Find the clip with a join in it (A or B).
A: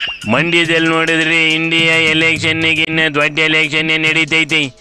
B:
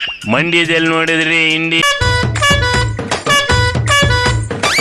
B